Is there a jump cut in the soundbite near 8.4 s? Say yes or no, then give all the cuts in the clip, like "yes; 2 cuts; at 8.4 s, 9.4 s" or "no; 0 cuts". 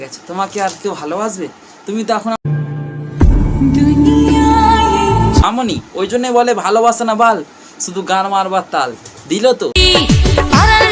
no; 3 cuts; at 2.4 s, 5.4 s, 9.7 s